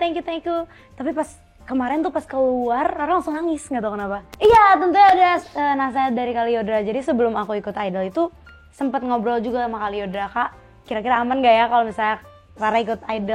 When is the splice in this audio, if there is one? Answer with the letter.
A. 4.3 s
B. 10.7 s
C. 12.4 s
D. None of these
A